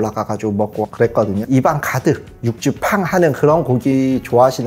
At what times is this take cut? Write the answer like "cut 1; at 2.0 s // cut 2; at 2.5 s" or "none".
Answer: cut 1; at 1.4 s